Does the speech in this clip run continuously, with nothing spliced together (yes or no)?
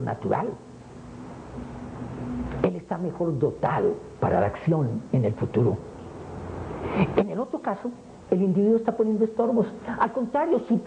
yes